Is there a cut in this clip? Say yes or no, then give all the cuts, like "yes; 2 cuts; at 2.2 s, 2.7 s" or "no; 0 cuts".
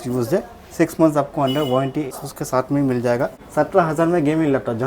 yes; 2 cuts; at 2.2 s, 3.4 s